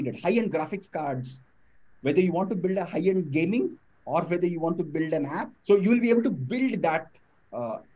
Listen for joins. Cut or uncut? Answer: cut